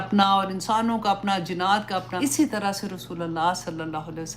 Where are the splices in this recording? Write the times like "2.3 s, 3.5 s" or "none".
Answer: 2.1 s